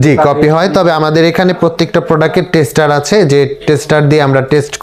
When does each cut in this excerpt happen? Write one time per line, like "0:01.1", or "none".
none